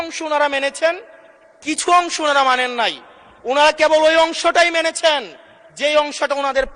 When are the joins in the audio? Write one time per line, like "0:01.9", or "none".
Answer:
none